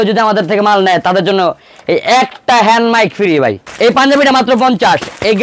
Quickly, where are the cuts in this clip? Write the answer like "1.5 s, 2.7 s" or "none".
3.6 s

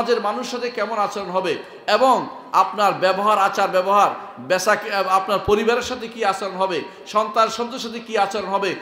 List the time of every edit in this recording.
none

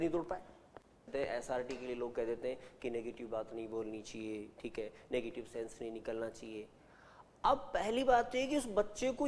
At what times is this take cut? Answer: 1.1 s

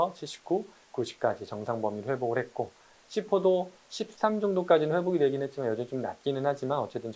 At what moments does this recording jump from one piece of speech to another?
none

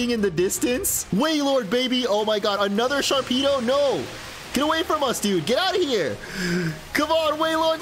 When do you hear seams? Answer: 1.0 s

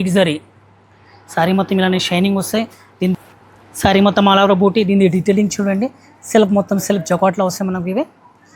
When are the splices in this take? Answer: 3.1 s

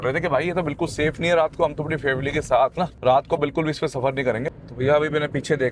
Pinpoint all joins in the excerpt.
2.9 s, 4.5 s

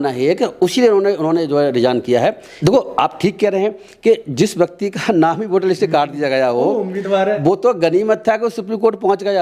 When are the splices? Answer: 2.5 s

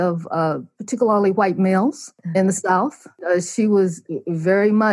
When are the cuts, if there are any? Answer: 2.1 s, 3.2 s

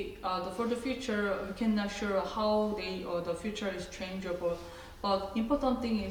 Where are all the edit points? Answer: none

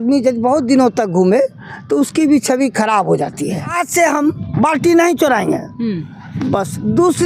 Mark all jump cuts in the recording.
3.8 s

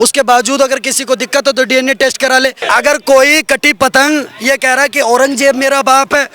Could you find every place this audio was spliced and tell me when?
2.6 s

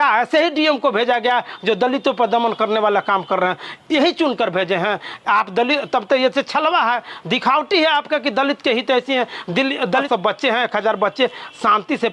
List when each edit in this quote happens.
10.0 s

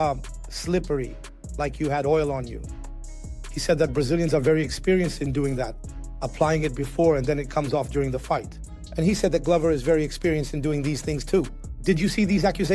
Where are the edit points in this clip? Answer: 11.6 s

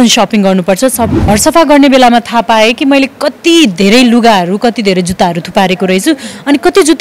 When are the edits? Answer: 1.2 s

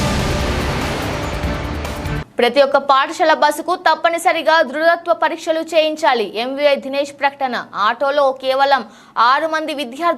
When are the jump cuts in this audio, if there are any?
2.1 s

